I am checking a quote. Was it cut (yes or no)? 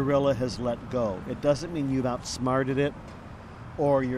no